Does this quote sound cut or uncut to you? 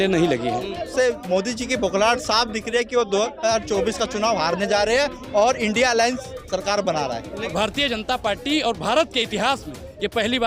cut